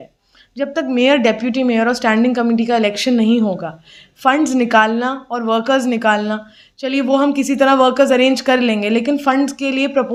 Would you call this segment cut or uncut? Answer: uncut